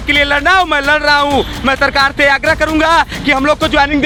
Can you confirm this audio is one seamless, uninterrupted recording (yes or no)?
yes